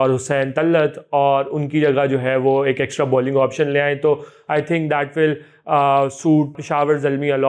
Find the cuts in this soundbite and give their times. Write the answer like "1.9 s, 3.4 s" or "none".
6.6 s